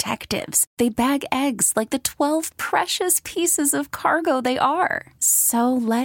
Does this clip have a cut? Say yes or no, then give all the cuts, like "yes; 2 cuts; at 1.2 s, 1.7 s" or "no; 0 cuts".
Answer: no; 0 cuts